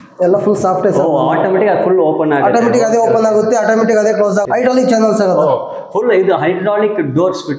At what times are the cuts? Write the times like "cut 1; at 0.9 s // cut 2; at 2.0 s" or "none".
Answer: cut 1; at 4.5 s